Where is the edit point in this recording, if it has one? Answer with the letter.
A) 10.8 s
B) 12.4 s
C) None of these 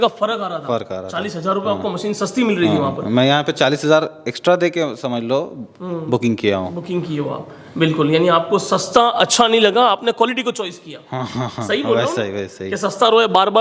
C